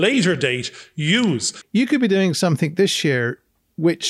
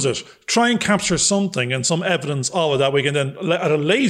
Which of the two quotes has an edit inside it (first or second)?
first